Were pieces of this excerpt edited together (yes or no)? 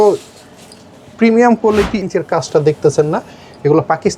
yes